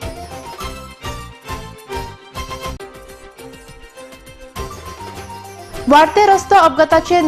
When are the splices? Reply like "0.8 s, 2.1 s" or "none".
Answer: 5.4 s